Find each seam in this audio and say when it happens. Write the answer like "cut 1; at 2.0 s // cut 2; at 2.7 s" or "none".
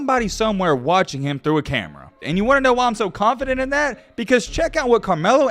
cut 1; at 2.2 s

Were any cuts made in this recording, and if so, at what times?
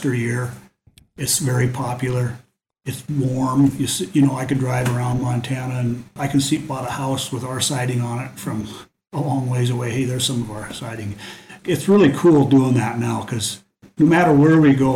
cut 1; at 6.2 s // cut 2; at 11.6 s

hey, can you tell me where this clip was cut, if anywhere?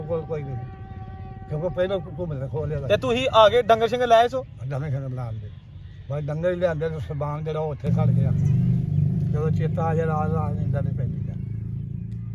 cut 1; at 2.8 s // cut 2; at 7.9 s

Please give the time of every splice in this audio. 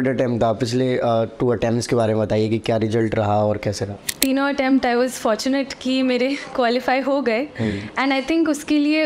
cut 1; at 4.1 s

